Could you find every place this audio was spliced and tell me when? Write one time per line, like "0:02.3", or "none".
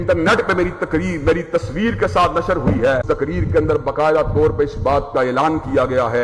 0:03.0